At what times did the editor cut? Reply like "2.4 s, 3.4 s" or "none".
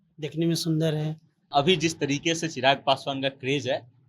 1.5 s